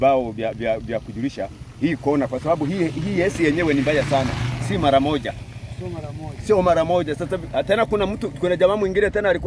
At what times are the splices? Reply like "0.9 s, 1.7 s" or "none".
none